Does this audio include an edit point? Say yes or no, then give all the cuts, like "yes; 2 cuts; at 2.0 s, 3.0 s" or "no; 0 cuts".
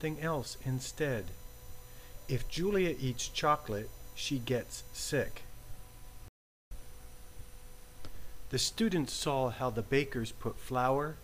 yes; 1 cut; at 6.3 s